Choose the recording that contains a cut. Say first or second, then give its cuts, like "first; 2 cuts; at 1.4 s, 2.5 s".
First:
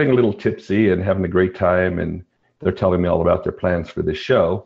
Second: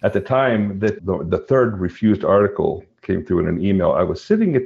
second; 1 cut; at 1.0 s